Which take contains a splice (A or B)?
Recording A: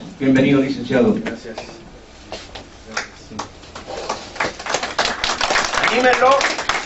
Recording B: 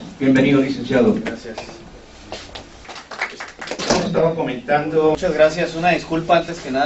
B